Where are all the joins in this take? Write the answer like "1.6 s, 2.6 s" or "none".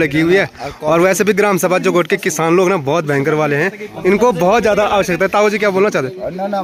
none